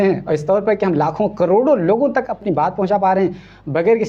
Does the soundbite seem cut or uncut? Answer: uncut